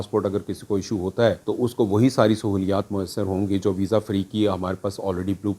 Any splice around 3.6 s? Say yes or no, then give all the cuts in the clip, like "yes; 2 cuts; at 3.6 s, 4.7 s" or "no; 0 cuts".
no; 1 cut; at 1.4 s